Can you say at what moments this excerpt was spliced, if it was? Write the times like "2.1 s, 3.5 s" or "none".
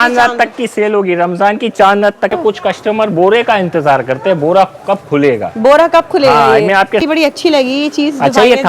2.3 s, 7.0 s